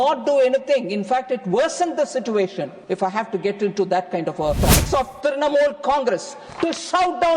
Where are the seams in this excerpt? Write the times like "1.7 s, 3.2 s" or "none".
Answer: 2.7 s, 4.8 s